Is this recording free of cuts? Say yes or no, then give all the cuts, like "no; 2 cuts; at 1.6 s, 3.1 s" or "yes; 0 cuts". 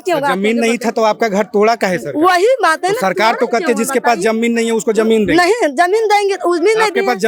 yes; 0 cuts